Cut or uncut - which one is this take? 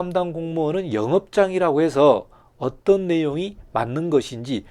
uncut